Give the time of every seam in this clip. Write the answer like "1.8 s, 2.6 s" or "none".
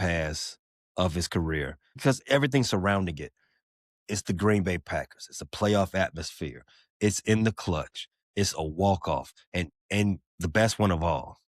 2.0 s